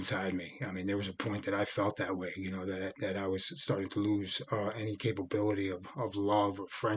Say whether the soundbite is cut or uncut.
uncut